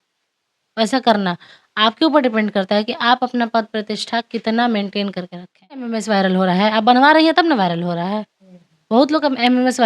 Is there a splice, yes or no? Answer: yes